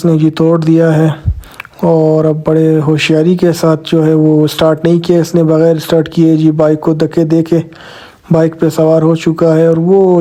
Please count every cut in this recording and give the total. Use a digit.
0